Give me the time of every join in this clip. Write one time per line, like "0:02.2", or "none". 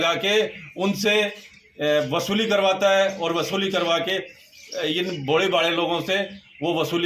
none

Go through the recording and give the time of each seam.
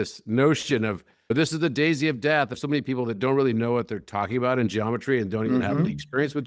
0:01.3
0:02.6

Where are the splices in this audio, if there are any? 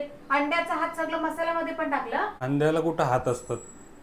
0:02.4

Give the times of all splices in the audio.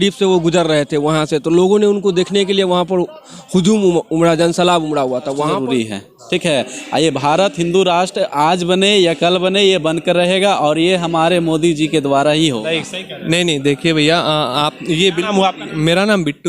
0:05.5

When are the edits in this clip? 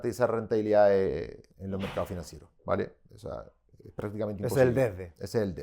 0:01.5

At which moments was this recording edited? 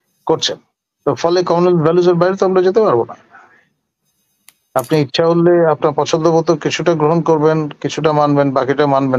none

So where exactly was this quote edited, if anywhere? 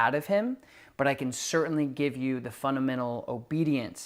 none

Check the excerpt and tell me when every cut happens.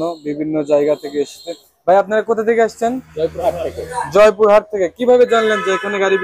none

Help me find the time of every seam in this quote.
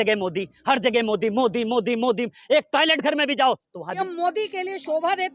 0:04.0

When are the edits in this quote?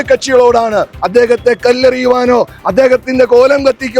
0:01.0

